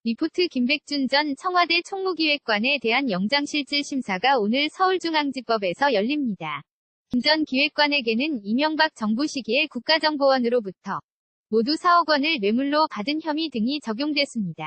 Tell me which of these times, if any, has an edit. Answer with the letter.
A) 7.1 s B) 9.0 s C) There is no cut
A